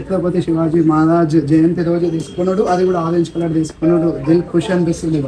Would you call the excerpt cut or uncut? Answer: uncut